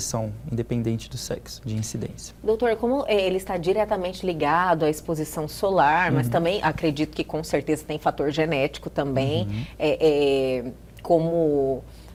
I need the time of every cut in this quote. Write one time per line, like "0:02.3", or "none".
none